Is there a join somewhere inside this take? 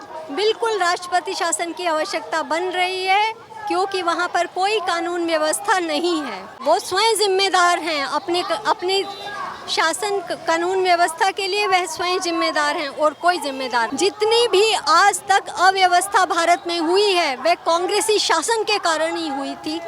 yes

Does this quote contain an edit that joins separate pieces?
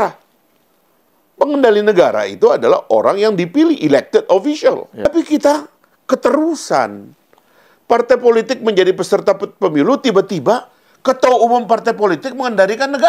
yes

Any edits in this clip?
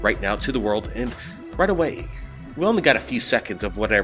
no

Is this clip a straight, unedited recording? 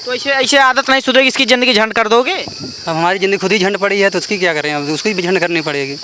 yes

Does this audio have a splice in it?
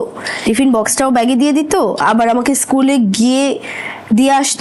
no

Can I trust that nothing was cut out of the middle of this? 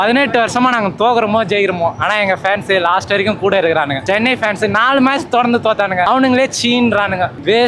yes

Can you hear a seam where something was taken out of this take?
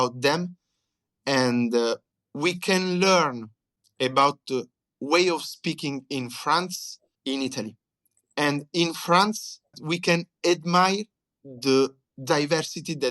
yes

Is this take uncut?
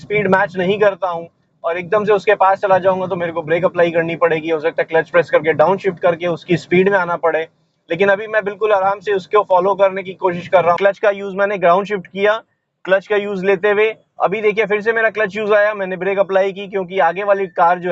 no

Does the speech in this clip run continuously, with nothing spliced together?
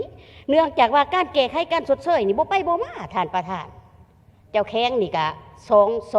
yes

